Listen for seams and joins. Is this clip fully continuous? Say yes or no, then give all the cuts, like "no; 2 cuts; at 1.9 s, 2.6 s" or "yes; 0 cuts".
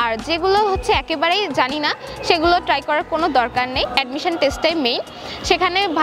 no; 1 cut; at 3.9 s